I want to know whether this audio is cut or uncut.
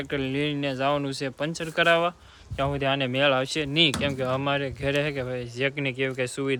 uncut